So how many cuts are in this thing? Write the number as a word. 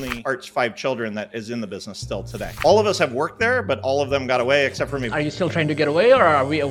one